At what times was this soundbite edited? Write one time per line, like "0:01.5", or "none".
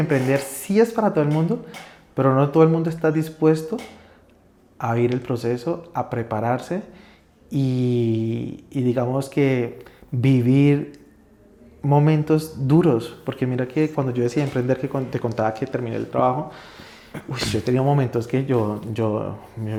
none